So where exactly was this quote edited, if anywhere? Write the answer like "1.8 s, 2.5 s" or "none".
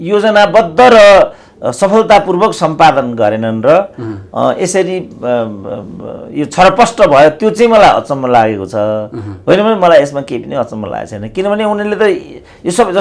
none